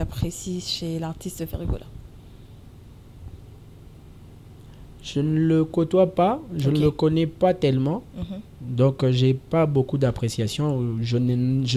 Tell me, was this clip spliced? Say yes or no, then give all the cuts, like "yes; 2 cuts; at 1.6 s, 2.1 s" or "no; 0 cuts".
no; 0 cuts